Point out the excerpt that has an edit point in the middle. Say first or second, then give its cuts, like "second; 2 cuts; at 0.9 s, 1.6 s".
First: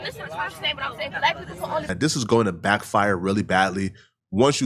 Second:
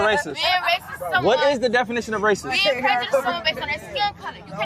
first; 1 cut; at 1.9 s